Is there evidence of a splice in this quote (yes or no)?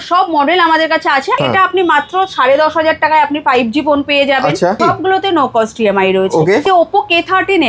yes